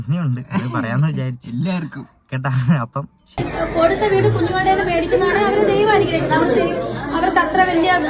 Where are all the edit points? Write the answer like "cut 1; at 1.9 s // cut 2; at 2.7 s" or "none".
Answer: cut 1; at 3.2 s